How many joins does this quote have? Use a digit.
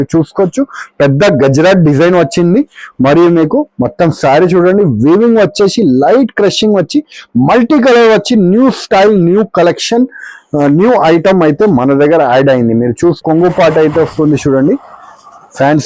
1